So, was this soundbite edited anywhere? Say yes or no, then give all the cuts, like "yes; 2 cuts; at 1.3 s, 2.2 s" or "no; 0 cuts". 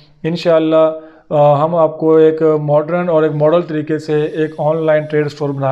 no; 0 cuts